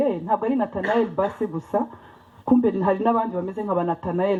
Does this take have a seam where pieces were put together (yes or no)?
no